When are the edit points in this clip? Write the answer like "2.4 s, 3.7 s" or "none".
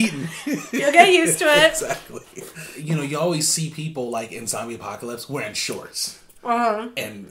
2.7 s